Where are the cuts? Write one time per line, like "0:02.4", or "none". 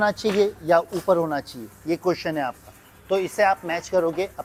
none